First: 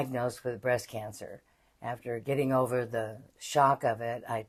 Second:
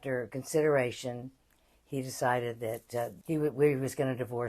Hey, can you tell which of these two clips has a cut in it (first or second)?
second